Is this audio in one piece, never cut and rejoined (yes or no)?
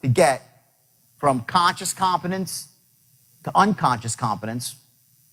yes